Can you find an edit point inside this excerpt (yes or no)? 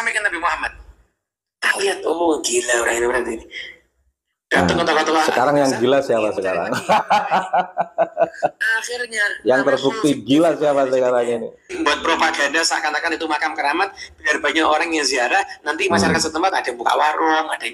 yes